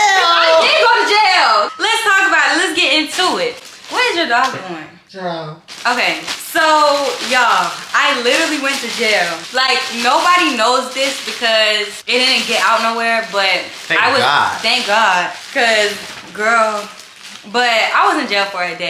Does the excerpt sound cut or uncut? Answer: uncut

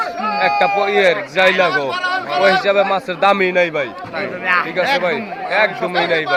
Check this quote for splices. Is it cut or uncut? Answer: uncut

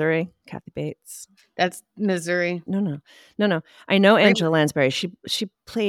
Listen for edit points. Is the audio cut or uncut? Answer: cut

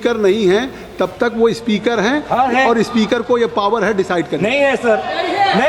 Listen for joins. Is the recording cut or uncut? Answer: uncut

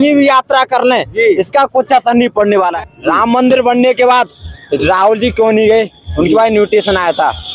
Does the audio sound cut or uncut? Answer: cut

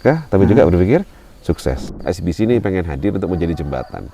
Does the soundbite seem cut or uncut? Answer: cut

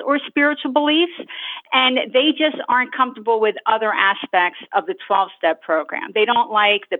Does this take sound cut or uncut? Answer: uncut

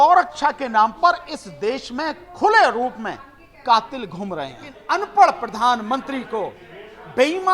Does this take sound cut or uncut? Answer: cut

